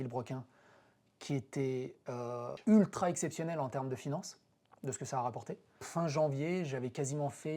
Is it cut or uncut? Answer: cut